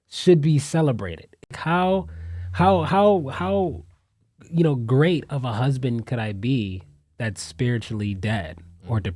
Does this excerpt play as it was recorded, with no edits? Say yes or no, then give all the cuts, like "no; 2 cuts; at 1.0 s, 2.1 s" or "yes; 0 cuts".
no; 1 cut; at 1.5 s